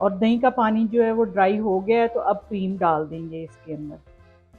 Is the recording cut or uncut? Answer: uncut